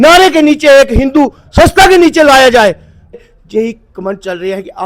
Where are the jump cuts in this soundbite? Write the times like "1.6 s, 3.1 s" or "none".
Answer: 2.9 s

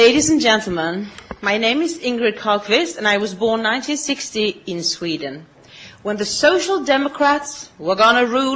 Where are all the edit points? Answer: 6.2 s

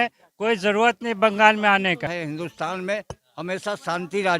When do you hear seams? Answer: 2.1 s

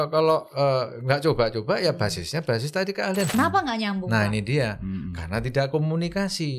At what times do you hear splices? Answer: 3.3 s

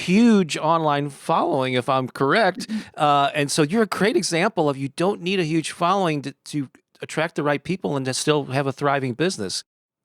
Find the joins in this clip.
none

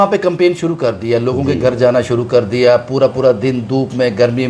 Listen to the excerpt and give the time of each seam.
none

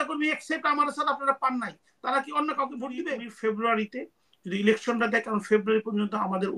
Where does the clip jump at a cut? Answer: 3.2 s

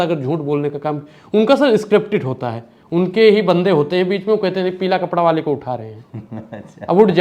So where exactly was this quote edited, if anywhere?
none

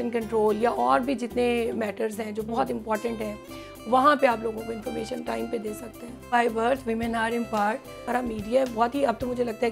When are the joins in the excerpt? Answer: 6.3 s, 8.0 s

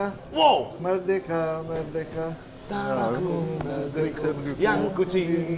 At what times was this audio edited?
none

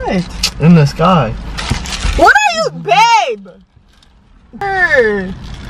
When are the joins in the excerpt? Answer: 4.6 s

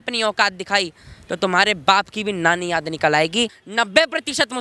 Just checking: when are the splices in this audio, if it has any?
3.6 s

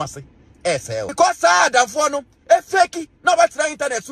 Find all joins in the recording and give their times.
1.1 s, 3.1 s

